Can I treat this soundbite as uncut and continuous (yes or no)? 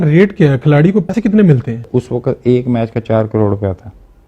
no